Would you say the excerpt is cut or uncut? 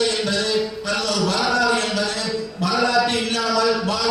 uncut